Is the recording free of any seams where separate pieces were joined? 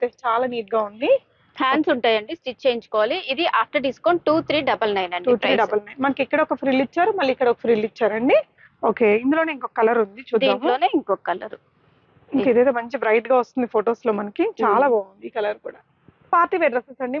yes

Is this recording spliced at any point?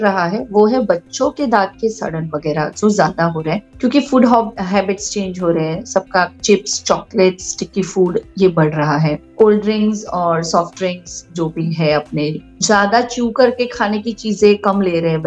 yes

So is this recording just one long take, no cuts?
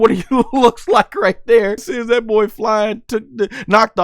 no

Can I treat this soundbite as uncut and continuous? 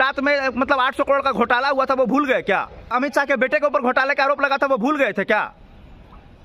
no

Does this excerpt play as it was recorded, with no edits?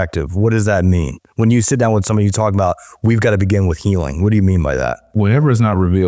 no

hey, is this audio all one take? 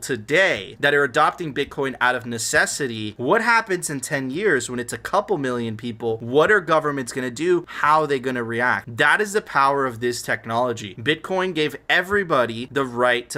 yes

